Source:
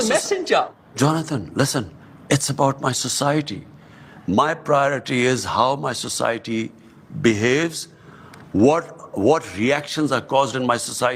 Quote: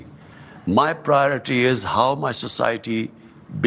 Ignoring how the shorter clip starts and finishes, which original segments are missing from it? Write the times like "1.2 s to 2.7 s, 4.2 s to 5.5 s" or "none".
none